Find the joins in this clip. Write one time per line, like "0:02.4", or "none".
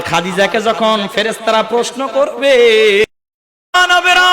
0:03.0